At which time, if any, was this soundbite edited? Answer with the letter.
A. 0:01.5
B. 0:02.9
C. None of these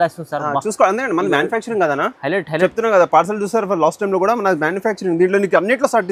C